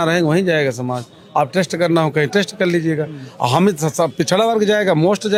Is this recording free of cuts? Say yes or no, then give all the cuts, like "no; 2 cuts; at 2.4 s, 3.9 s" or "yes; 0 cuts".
yes; 0 cuts